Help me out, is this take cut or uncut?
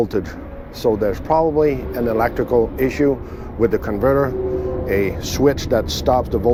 uncut